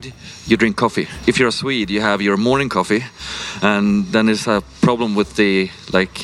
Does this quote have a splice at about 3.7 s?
no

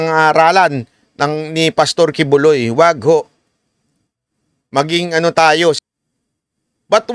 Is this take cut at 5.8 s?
yes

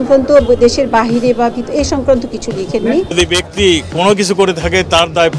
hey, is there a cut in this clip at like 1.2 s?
no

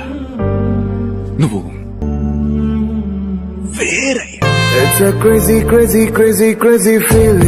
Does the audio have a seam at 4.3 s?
yes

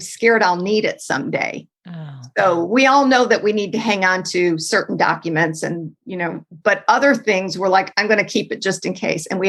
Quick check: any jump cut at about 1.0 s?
no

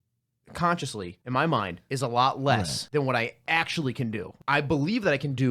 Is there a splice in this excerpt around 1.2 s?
yes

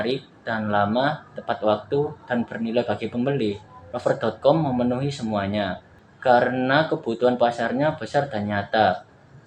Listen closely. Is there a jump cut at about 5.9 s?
yes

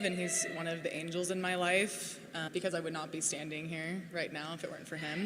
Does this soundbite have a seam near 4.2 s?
no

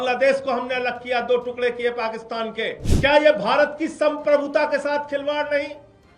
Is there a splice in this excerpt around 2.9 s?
yes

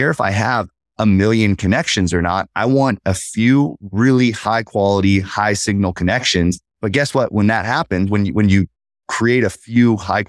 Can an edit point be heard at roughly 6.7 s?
yes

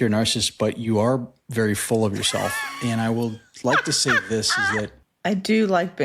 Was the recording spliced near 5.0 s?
yes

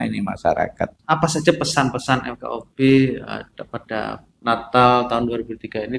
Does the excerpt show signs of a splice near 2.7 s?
no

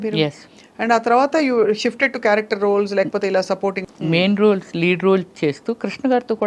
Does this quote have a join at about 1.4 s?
no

